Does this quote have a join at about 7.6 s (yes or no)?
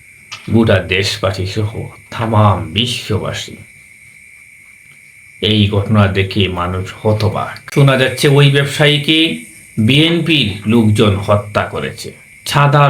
yes